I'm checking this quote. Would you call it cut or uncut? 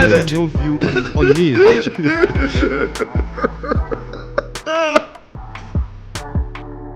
uncut